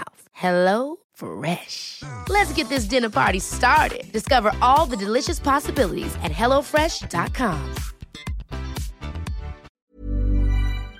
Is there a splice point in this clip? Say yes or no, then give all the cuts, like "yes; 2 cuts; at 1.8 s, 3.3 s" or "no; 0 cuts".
yes; 1 cut; at 9.8 s